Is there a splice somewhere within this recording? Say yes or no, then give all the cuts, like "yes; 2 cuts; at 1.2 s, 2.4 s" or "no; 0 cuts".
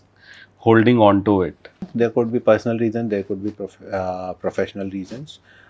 yes; 1 cut; at 1.8 s